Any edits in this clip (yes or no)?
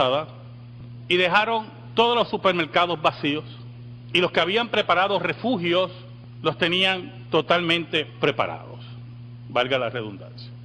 yes